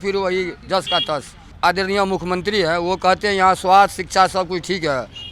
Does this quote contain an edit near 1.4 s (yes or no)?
yes